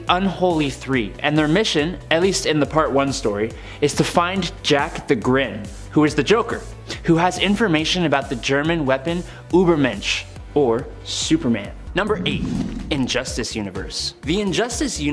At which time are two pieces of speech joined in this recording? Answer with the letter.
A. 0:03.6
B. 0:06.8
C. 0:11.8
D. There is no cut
C